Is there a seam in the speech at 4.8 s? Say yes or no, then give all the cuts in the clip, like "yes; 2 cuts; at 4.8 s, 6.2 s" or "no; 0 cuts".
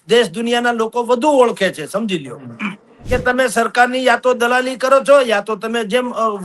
no; 1 cut; at 3.0 s